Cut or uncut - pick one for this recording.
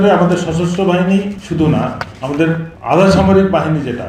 cut